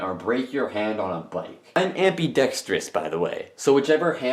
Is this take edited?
yes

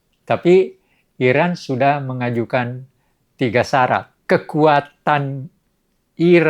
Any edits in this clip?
yes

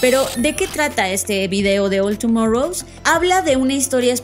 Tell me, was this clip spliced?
yes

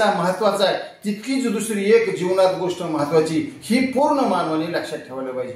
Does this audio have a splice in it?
no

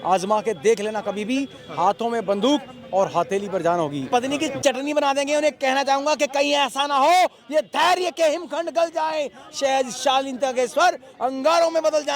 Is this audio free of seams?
no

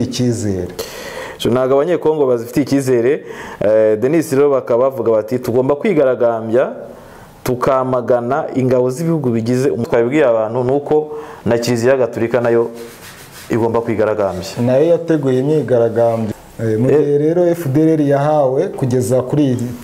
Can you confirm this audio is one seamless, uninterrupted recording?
no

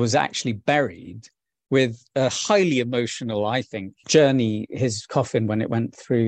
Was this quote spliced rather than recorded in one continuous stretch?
yes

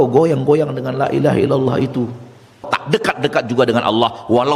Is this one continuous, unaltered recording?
no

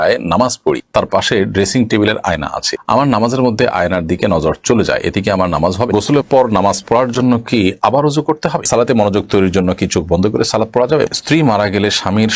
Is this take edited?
yes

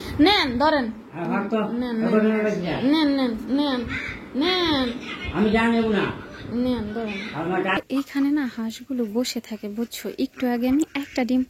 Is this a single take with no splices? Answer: no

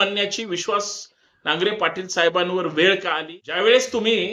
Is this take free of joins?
no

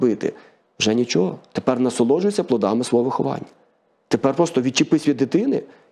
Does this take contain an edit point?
no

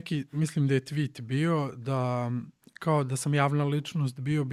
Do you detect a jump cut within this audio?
no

